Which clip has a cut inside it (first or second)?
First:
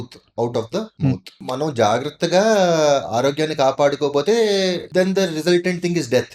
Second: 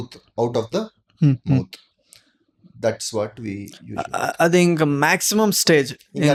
first